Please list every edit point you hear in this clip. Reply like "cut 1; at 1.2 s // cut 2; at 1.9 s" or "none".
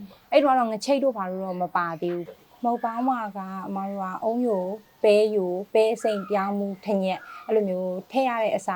cut 1; at 2.2 s